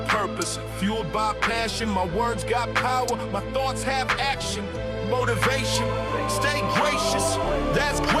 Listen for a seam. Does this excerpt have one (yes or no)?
no